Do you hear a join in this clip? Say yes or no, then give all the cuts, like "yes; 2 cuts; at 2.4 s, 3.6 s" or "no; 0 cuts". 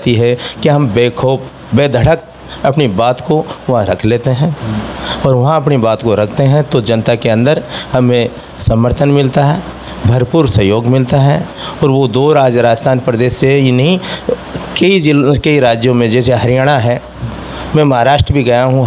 no; 0 cuts